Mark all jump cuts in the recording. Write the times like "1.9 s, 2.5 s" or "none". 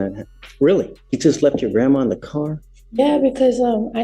1.0 s